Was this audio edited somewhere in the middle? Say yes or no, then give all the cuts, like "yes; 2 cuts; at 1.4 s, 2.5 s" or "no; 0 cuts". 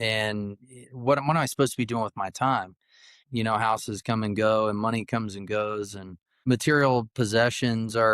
yes; 2 cuts; at 3.2 s, 6.4 s